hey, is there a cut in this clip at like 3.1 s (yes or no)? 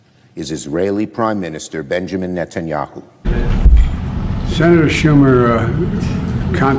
yes